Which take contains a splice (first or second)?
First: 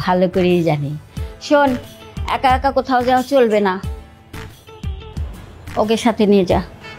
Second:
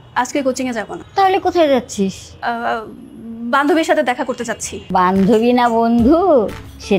second